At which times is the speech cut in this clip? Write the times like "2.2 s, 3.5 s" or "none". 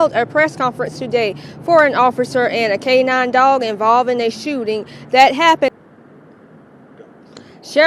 5.7 s